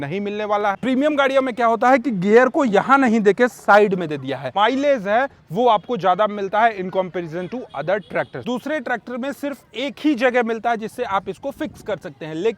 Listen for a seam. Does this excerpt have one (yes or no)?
yes